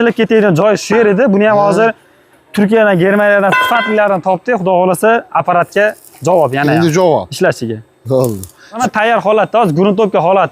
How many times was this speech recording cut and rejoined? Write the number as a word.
one